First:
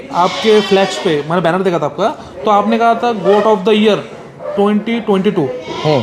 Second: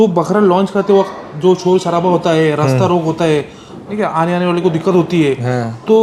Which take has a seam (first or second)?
second